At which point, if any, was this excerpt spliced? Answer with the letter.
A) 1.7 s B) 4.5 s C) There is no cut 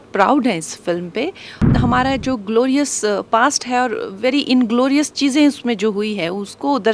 A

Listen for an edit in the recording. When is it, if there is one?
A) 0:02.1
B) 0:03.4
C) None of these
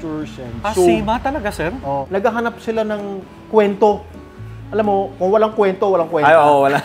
A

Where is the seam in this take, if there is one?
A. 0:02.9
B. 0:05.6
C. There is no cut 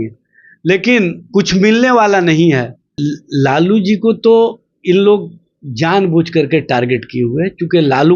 A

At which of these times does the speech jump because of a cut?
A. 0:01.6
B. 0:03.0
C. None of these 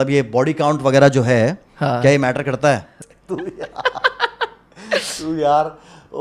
B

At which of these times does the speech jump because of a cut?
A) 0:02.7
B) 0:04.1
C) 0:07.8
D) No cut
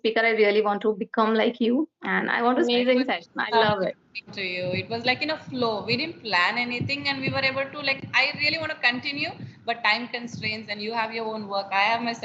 A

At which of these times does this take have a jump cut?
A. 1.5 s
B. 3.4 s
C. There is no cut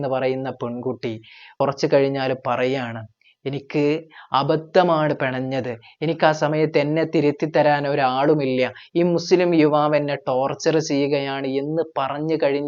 A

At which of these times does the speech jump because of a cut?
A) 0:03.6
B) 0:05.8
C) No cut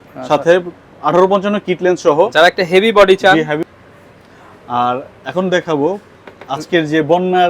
A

